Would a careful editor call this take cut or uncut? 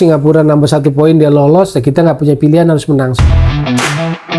cut